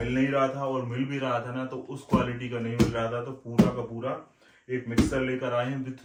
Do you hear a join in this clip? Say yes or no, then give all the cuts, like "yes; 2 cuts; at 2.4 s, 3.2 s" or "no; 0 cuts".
no; 0 cuts